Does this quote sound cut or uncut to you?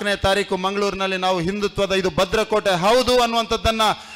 uncut